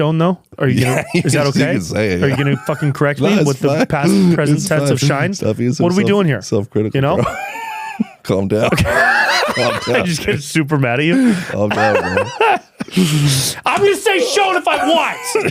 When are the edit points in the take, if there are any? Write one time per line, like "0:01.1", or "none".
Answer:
none